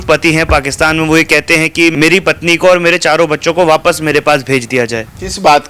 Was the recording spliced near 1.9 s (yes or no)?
yes